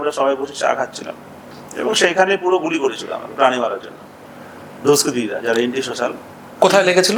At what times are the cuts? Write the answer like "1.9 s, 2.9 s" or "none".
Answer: none